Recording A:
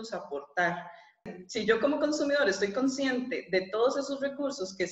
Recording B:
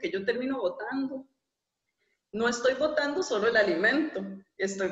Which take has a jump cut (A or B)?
A